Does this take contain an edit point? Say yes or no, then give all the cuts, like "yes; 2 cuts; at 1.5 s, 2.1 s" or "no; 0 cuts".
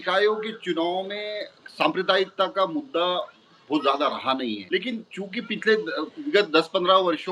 yes; 1 cut; at 4.6 s